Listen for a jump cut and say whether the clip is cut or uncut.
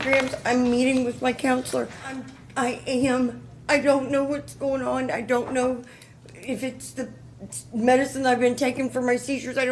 uncut